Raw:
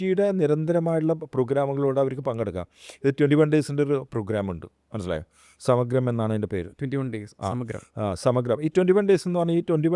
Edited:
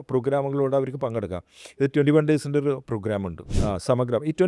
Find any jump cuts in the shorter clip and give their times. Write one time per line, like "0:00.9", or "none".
0:03.5